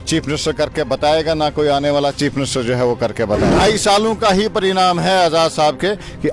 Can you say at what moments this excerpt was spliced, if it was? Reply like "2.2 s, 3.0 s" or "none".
3.5 s

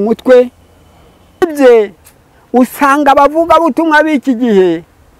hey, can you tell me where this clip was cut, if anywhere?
1.4 s

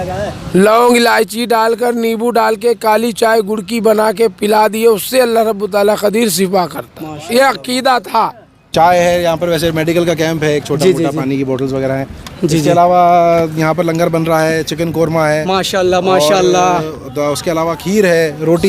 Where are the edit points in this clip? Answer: 8.7 s

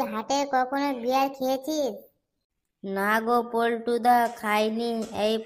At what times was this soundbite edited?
none

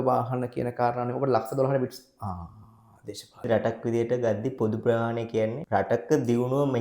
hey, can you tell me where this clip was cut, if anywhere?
3.5 s

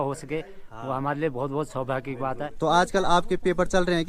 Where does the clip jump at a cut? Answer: 2.5 s

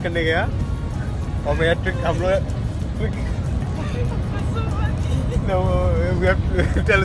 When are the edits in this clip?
none

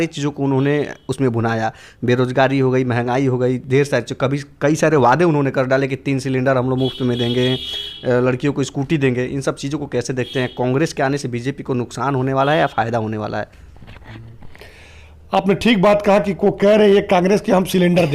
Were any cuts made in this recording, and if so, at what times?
none

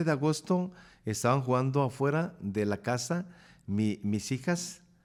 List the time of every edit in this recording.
none

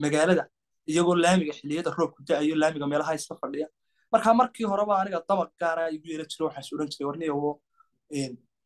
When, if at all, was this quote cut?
none

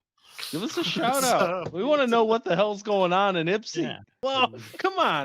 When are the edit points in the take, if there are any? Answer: 4.0 s

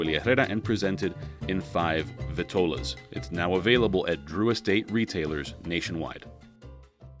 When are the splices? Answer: 6.2 s

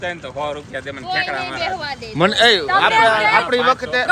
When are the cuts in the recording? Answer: none

